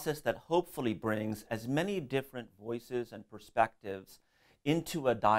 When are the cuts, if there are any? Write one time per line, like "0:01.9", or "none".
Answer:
0:03.8